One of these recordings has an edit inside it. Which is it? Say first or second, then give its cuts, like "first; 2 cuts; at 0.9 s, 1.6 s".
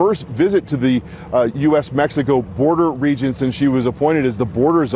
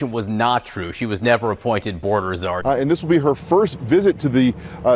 second; 1 cut; at 2.6 s